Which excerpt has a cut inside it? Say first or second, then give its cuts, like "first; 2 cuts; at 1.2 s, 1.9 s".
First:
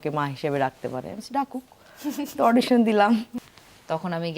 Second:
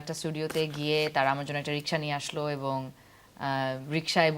first; 1 cut; at 3.3 s